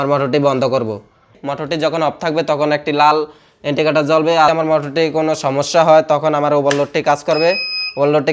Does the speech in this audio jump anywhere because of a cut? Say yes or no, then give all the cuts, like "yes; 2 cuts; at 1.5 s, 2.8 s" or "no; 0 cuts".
yes; 2 cuts; at 1.4 s, 4.5 s